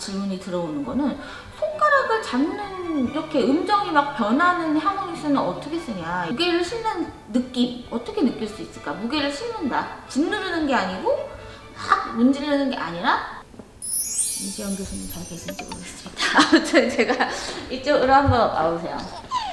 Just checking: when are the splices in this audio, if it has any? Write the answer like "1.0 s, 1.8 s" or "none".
3.2 s, 6.3 s, 13.4 s